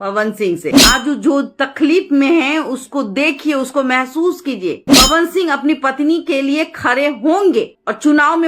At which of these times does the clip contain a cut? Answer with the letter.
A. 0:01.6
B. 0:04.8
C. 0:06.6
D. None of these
B